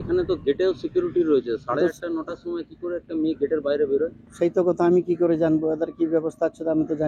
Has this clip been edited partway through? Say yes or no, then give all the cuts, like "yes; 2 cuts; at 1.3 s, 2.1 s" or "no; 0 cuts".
no; 0 cuts